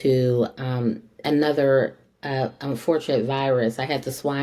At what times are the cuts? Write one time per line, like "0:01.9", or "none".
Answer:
none